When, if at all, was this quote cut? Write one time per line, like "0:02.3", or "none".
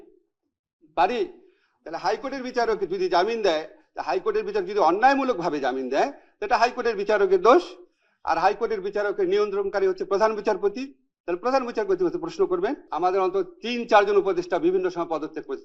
0:12.8